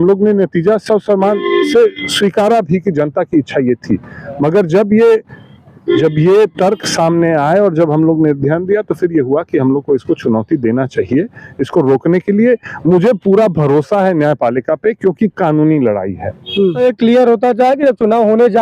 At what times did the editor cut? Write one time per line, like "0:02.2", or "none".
0:16.8

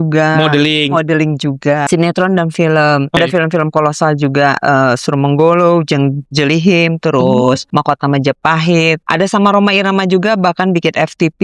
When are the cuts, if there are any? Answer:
0:01.8
0:03.2
0:07.6
0:09.0

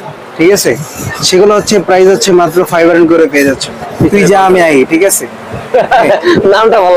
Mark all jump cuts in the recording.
0:03.8

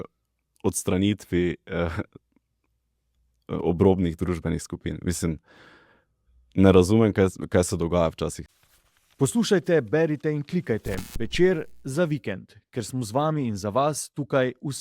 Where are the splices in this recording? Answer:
0:08.4

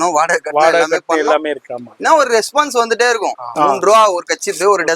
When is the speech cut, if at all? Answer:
0:03.5

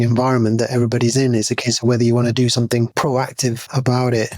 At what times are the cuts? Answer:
0:03.5

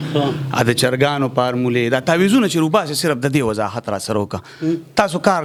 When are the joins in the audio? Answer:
none

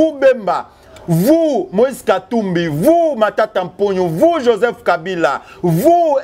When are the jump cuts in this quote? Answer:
none

